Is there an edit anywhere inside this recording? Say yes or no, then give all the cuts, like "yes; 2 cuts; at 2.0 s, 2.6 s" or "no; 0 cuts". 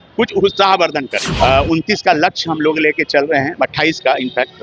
yes; 1 cut; at 1.2 s